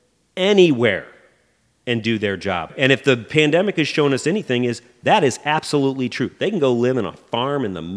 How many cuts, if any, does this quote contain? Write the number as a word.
one